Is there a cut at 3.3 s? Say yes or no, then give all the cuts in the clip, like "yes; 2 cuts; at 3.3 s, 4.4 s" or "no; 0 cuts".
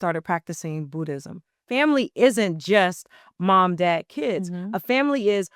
no; 1 cut; at 1.6 s